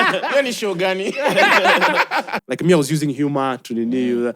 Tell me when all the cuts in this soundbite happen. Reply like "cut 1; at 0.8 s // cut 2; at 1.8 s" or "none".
cut 1; at 2.4 s